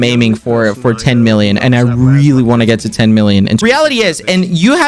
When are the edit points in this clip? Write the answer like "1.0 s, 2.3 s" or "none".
3.6 s